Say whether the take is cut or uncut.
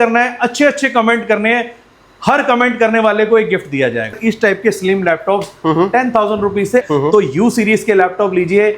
cut